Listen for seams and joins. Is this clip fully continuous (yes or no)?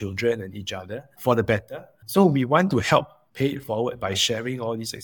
no